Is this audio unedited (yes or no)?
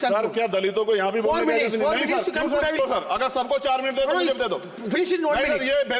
no